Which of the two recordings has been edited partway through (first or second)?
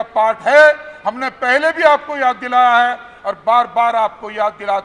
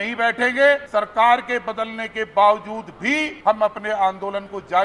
second